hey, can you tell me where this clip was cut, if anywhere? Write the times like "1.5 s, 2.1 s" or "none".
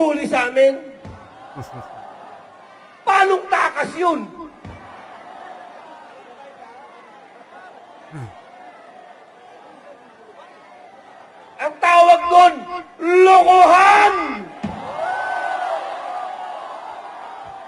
none